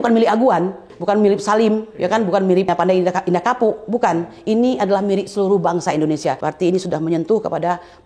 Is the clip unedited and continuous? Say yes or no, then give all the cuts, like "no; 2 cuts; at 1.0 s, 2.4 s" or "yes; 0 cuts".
no; 3 cuts; at 0.9 s, 2.7 s, 6.4 s